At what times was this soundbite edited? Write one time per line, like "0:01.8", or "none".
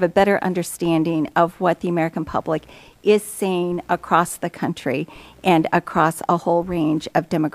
0:03.4